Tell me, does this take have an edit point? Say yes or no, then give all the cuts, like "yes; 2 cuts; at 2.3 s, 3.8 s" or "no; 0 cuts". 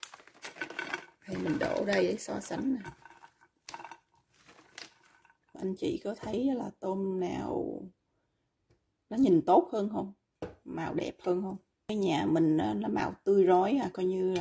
yes; 2 cuts; at 5.5 s, 11.9 s